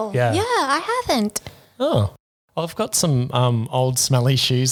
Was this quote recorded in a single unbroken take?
yes; 0 cuts

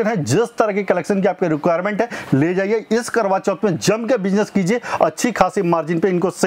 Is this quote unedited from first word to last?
yes; 0 cuts

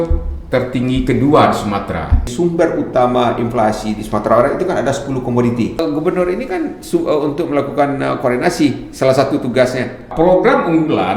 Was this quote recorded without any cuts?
no; 3 cuts; at 2.3 s, 5.8 s, 10.1 s

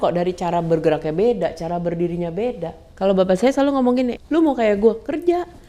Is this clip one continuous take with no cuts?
no; 2 cuts; at 2.8 s, 4.2 s

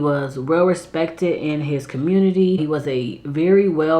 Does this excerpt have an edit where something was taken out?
yes; 1 cut; at 2.6 s

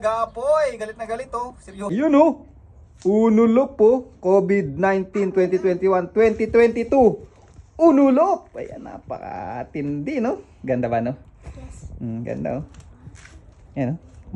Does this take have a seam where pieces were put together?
yes; 1 cut; at 1.9 s

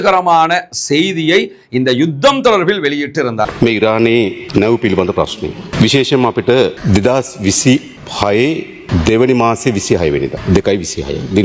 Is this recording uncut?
no; 7 cuts; at 3.5 s, 4.4 s, 5.7 s, 6.8 s, 8.0 s, 8.8 s, 10.4 s

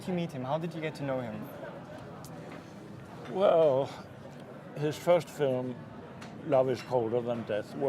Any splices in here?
yes; 1 cut; at 5.7 s

